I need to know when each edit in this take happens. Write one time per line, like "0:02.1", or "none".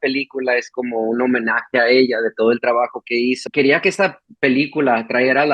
0:03.4